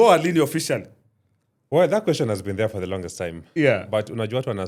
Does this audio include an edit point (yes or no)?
no